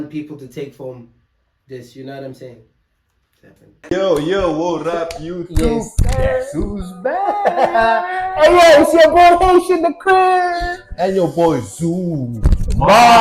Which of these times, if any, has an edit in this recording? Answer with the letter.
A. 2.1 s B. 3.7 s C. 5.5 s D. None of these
B